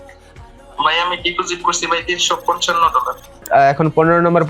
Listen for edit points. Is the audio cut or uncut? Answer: cut